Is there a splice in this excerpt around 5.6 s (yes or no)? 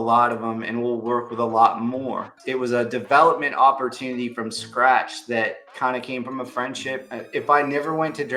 yes